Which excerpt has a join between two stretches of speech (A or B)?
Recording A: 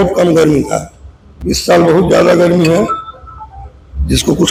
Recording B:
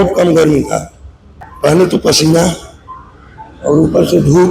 B